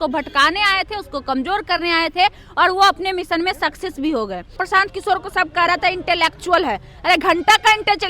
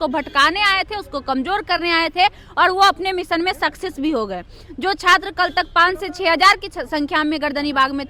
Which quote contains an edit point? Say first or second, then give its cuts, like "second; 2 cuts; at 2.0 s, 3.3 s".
first; 1 cut; at 4.6 s